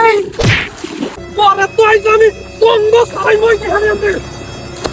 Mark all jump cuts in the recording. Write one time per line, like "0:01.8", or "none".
0:01.2